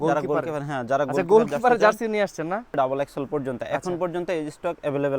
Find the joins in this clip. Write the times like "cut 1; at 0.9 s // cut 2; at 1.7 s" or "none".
cut 1; at 2.7 s

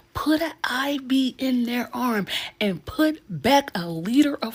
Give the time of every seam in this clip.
none

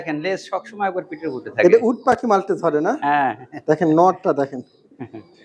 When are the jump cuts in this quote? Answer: none

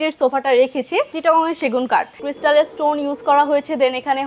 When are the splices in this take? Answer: cut 1; at 1.1 s // cut 2; at 2.2 s

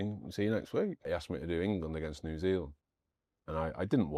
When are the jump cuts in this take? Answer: cut 1; at 1.1 s

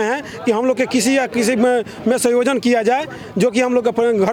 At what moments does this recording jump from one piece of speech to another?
none

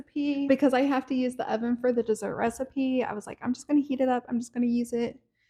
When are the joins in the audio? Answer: none

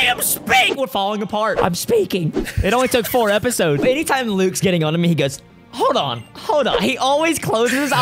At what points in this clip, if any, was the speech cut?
cut 1; at 1.6 s // cut 2; at 3.8 s

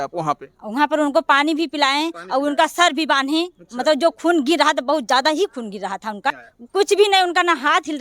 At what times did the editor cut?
cut 1; at 6.5 s

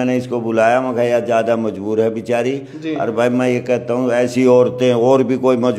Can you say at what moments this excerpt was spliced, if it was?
none

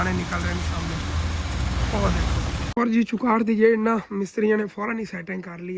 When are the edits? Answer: cut 1; at 2.7 s

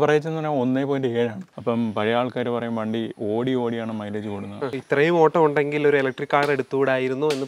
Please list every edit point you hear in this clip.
cut 1; at 1.5 s // cut 2; at 4.7 s

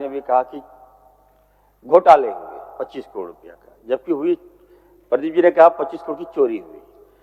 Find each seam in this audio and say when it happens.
none

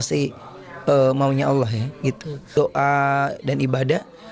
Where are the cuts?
cut 1; at 2.6 s

